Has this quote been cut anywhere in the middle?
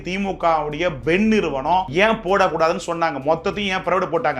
yes; 1 cut; at 1.9 s

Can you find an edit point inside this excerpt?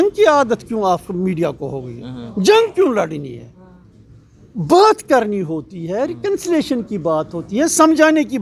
no; 0 cuts

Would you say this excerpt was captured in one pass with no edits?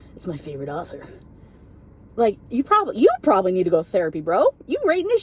yes; 0 cuts

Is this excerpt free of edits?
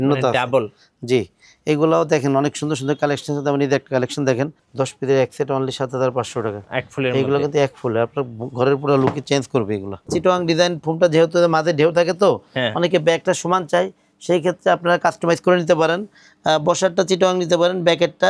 no; 2 cuts; at 4.6 s, 10.0 s

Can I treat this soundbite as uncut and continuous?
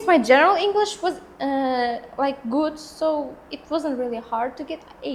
yes; 0 cuts

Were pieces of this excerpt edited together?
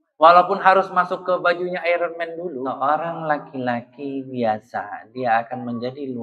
yes; 1 cut; at 2.7 s

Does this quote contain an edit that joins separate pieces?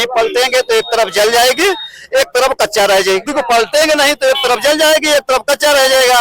yes; 1 cut; at 3.3 s

